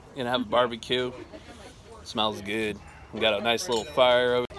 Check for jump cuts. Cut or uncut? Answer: uncut